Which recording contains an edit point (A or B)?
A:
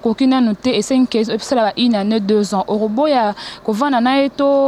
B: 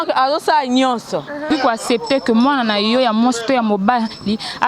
B